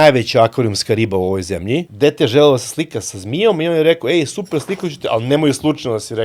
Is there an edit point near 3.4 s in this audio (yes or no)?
no